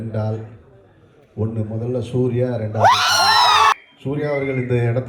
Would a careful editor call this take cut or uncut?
cut